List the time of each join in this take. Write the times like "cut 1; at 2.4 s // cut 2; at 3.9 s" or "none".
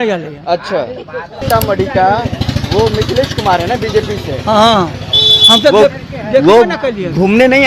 cut 1; at 1.4 s